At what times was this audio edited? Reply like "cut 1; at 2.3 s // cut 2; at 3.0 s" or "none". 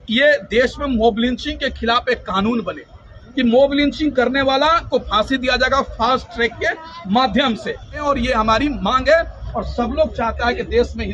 cut 1; at 8.0 s // cut 2; at 9.4 s